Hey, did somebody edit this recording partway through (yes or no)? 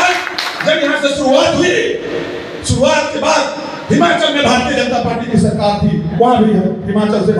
no